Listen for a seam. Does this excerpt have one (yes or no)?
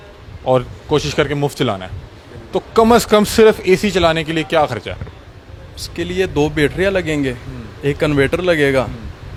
no